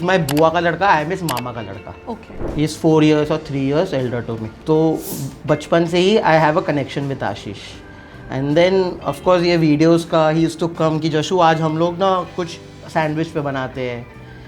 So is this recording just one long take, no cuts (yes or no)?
no